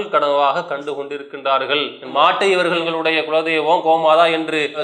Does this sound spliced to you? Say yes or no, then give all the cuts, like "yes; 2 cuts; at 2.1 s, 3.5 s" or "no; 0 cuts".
yes; 2 cuts; at 2.0 s, 2.8 s